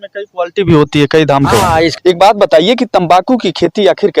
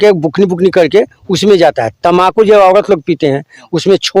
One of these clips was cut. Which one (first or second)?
first